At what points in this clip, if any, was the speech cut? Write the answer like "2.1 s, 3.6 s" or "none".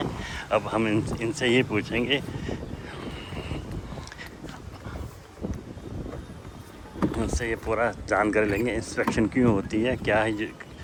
none